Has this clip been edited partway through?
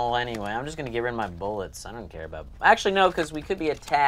no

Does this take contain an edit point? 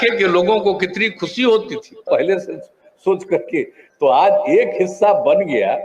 yes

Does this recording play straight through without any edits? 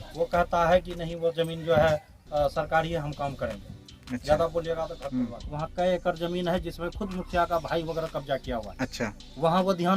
no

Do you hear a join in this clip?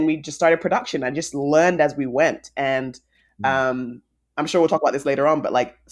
no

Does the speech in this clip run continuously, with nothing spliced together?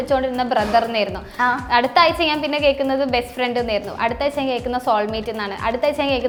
yes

